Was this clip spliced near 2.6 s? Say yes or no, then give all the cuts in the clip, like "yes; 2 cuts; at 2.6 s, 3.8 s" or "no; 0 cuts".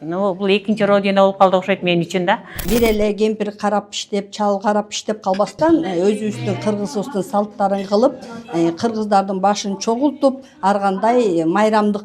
yes; 1 cut; at 2.6 s